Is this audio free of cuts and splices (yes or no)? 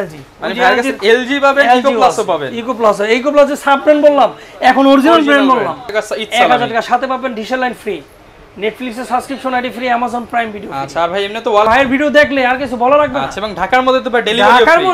no